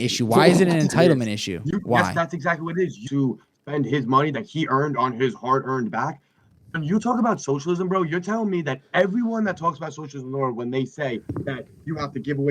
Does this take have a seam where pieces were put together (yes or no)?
yes